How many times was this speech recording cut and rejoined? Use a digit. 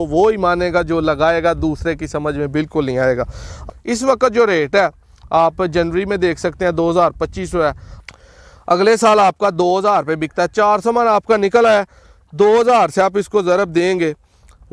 2